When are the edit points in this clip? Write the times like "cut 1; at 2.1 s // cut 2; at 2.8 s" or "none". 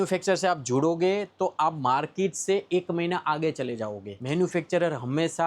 none